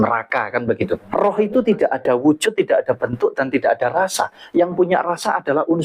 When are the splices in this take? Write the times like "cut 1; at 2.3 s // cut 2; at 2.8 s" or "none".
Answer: cut 1; at 1.0 s

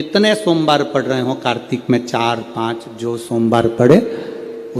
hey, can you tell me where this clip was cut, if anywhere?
none

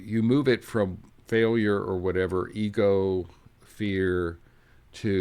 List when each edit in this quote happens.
none

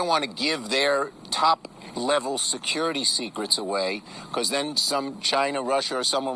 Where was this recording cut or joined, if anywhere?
none

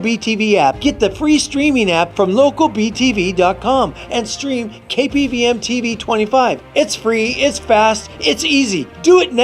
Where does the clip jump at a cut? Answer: cut 1; at 1.9 s // cut 2; at 3.6 s

